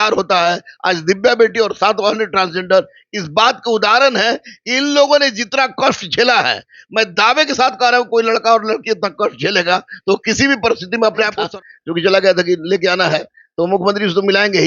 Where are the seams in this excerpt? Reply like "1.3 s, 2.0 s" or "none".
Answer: 11.4 s

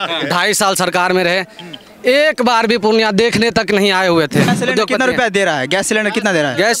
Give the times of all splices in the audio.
4.5 s

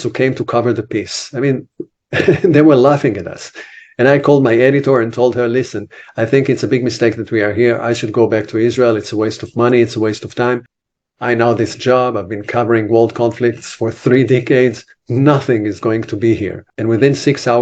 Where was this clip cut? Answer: 10.8 s, 16.7 s

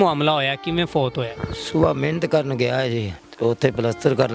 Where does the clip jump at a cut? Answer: 3.2 s

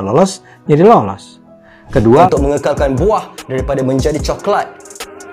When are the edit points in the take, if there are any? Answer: 2.3 s

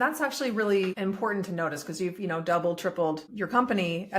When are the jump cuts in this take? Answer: 1.0 s, 3.3 s

